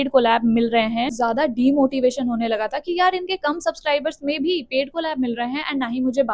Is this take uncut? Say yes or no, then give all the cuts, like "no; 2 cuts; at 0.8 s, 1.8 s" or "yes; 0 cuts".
no; 1 cut; at 1.1 s